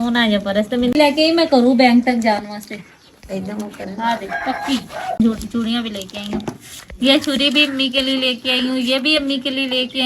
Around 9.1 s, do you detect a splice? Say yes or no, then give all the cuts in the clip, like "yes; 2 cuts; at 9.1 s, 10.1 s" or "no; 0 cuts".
no; 2 cuts; at 1.0 s, 5.2 s